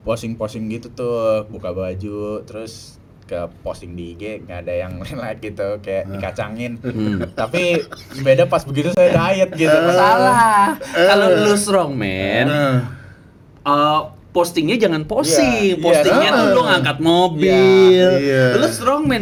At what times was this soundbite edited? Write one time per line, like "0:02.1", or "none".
none